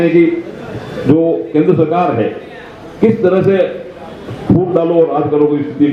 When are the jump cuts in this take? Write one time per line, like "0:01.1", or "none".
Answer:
none